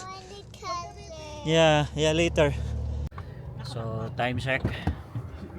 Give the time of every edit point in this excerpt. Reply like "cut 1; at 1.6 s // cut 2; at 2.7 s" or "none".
cut 1; at 3.1 s

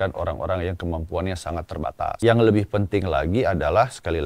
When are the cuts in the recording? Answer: cut 1; at 2.1 s

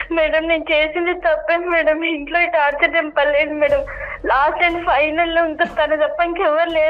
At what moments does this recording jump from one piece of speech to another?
none

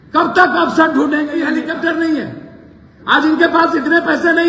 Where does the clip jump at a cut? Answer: cut 1; at 1.4 s

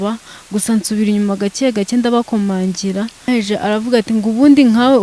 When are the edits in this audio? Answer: cut 1; at 3.2 s

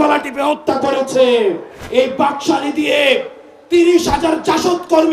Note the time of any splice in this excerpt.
cut 1; at 1.7 s

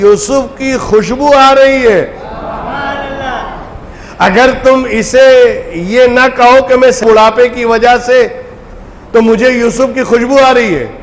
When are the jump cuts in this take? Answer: cut 1; at 7.0 s

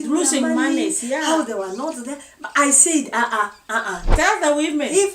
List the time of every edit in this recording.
cut 1; at 4.1 s

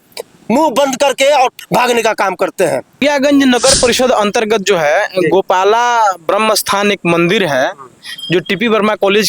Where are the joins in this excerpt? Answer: cut 1; at 3.0 s

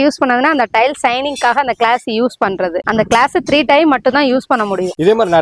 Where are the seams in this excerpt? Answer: none

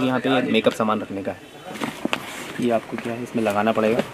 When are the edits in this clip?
cut 1; at 1.8 s

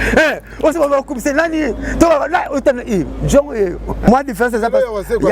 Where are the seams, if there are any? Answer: cut 1; at 4.1 s

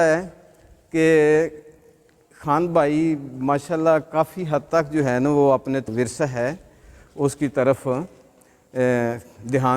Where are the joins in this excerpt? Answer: cut 1; at 5.9 s

